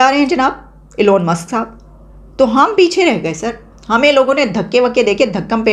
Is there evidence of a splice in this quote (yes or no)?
no